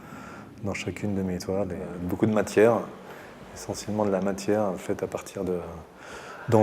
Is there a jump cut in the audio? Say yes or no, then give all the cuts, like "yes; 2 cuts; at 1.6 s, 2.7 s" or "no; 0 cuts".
yes; 1 cut; at 2.0 s